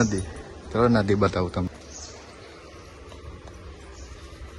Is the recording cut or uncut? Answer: cut